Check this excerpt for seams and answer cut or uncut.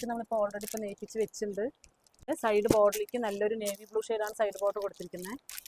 cut